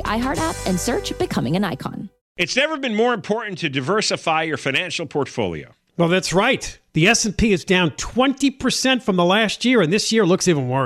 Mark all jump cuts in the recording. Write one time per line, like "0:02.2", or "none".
0:02.2